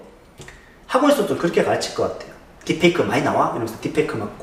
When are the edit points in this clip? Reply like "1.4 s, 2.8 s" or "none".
none